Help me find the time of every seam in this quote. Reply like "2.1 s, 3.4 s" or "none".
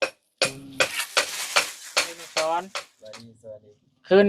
2.2 s